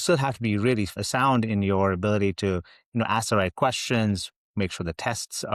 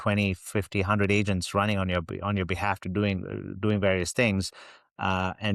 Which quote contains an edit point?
first; 1 cut; at 1.0 s

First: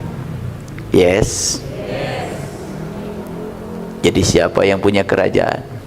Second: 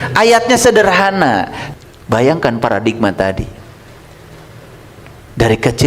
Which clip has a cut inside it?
second; 1 cut; at 1.6 s

